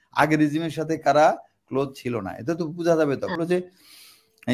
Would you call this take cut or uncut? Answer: cut